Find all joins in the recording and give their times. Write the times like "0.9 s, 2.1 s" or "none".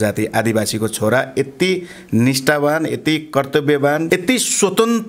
4.0 s